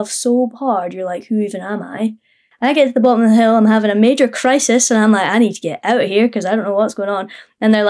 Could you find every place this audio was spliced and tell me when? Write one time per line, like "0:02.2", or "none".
0:02.4